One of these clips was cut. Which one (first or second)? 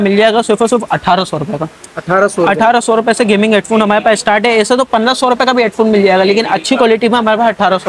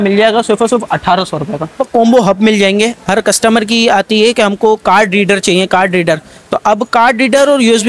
second